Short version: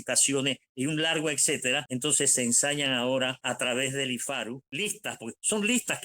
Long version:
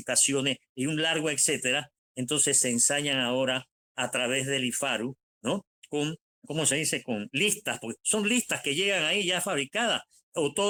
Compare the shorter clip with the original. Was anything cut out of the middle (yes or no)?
yes